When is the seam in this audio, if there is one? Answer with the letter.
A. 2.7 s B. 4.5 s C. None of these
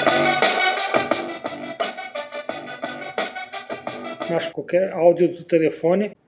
B